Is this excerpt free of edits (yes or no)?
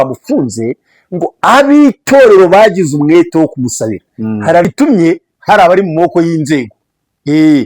no